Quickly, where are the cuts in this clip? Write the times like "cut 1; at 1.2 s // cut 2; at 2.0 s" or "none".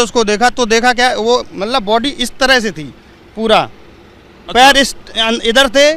none